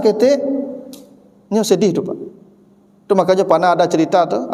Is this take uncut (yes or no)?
yes